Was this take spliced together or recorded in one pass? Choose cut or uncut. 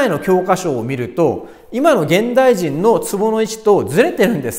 uncut